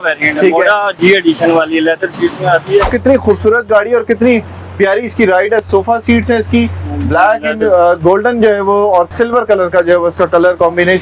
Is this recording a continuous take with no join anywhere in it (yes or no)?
no